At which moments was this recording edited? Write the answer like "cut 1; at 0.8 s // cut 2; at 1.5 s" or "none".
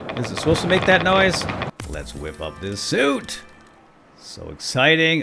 cut 1; at 1.7 s